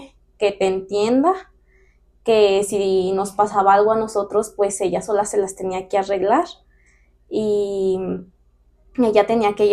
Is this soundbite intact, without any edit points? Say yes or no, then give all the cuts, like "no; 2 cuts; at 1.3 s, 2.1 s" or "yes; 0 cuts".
yes; 0 cuts